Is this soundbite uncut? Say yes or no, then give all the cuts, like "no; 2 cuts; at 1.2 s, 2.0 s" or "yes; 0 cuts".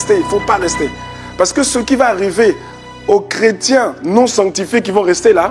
yes; 0 cuts